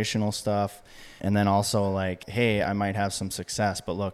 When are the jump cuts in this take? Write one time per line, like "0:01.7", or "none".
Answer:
0:01.2
0:02.3